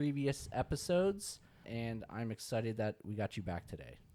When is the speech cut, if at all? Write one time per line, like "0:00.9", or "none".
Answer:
0:01.7